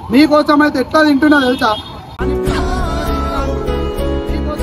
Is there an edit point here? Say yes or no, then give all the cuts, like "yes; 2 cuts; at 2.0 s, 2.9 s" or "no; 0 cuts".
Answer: no; 0 cuts